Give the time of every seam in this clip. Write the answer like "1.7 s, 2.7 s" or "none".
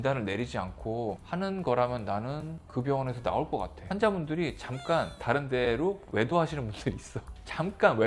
3.8 s